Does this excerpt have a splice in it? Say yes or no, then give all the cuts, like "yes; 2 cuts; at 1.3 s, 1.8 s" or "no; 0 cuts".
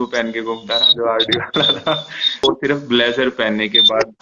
yes; 1 cut; at 2.4 s